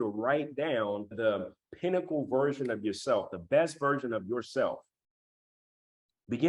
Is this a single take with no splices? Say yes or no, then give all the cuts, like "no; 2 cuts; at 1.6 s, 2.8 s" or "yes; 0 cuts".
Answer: no; 1 cut; at 1.1 s